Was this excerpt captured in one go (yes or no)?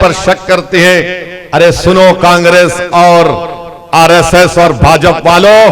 yes